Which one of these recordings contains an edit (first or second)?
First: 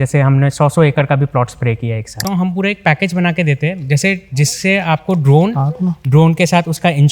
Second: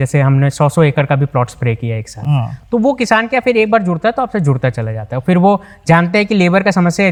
first